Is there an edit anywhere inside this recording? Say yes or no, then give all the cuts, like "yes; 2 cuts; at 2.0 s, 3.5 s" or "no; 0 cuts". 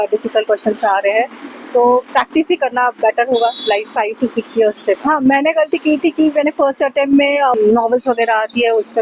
yes; 2 cuts; at 5.0 s, 7.5 s